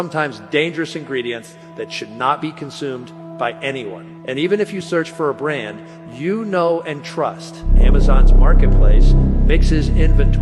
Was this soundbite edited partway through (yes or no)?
no